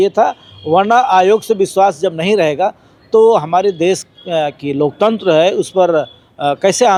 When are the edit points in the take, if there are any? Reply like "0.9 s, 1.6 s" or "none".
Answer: none